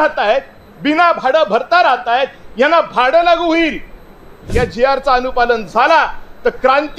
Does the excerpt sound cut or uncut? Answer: cut